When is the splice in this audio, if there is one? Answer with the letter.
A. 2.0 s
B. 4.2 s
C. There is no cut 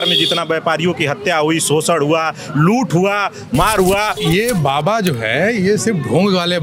B